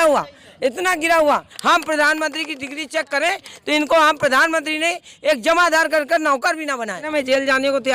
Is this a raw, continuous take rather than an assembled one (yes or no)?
no